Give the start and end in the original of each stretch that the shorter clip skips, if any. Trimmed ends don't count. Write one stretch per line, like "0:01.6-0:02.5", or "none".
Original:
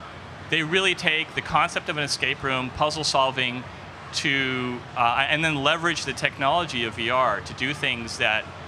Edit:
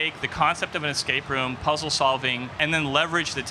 0:03.7-0:05.3